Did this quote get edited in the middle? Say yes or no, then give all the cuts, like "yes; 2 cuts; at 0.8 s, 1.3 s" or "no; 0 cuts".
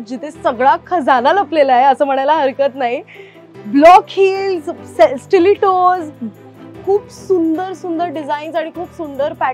no; 0 cuts